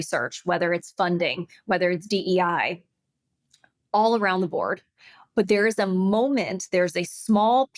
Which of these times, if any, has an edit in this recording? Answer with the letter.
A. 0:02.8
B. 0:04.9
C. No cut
C